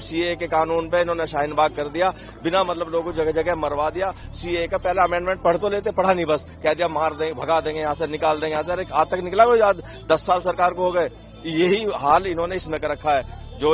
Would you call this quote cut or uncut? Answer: uncut